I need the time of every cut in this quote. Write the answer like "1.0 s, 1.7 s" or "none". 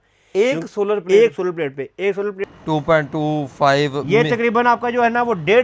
2.4 s